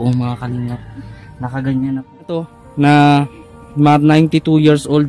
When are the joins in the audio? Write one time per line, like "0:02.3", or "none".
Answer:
0:02.6